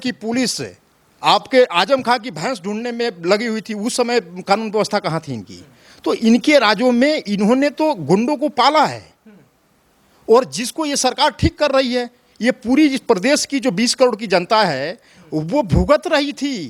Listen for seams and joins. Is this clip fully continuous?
yes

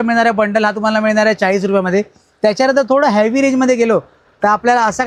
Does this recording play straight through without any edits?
yes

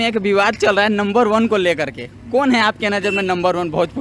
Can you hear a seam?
no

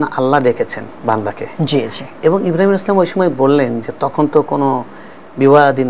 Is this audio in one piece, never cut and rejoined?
yes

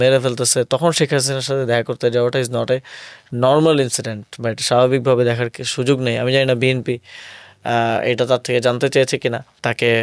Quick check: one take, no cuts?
yes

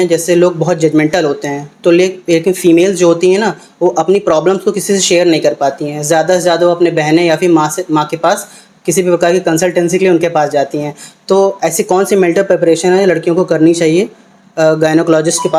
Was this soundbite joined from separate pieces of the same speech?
no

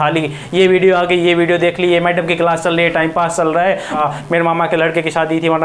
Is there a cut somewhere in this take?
yes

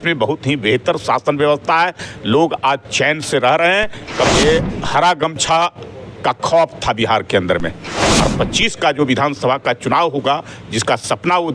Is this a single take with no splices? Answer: no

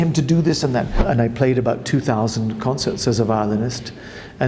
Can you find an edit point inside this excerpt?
yes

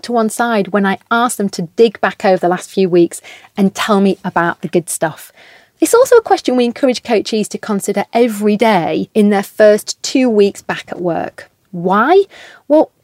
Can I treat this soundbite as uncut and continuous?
yes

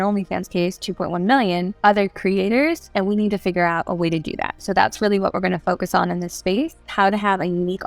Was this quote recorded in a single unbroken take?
no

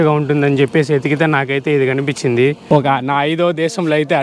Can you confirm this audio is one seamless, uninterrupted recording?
no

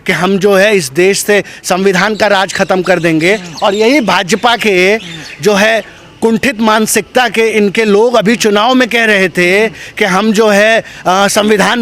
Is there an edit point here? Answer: no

